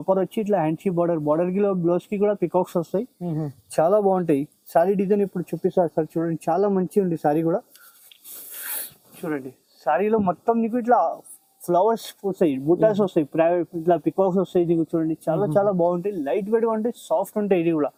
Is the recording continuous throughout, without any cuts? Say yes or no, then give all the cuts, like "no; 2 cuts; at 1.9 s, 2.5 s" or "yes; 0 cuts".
yes; 0 cuts